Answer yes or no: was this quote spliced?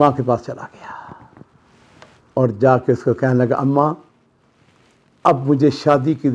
no